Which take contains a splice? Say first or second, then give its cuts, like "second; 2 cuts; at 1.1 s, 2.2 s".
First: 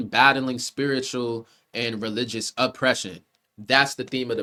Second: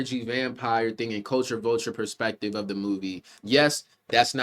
second; 1 cut; at 3.3 s